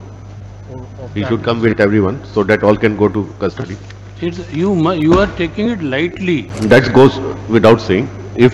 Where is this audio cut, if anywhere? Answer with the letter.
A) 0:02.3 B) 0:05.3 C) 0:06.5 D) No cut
C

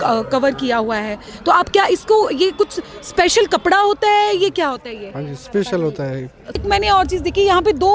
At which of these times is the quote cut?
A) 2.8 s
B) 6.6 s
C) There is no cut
B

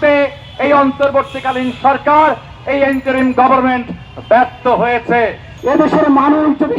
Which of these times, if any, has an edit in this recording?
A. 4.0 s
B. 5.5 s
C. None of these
B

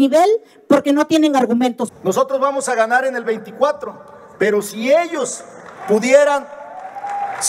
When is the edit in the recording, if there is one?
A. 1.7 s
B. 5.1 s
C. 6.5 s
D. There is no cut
A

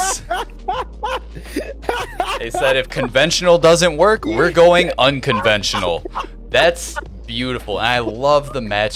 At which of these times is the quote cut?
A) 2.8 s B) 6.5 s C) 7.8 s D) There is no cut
D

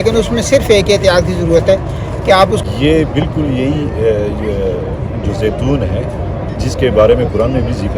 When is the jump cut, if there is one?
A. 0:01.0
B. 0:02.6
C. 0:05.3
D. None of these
B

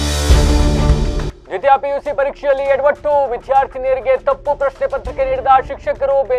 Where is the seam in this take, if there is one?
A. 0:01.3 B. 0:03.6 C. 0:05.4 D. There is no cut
A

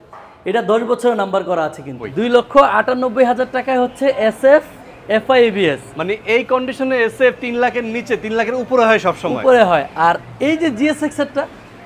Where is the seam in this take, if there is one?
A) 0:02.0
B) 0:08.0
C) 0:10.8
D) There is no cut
A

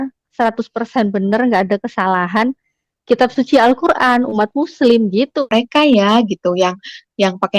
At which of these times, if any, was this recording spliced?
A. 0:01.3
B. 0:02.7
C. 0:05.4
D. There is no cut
C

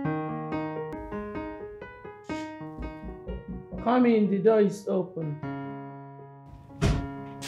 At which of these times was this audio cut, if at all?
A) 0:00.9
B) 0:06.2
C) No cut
A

